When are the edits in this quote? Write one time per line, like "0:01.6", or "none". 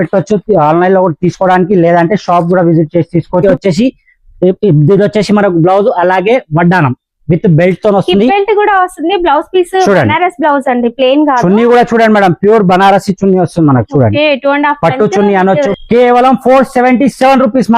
0:03.4
0:15.7